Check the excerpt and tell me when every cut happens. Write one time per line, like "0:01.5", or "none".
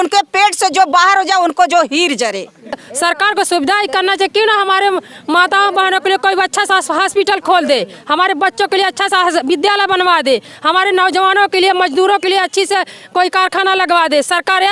0:02.8